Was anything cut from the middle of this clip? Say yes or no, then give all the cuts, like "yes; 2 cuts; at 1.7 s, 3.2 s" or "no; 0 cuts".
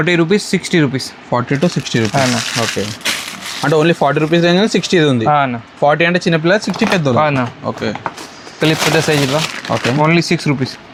no; 0 cuts